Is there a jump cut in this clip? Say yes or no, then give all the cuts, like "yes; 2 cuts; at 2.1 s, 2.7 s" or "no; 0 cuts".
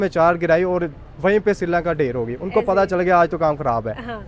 no; 0 cuts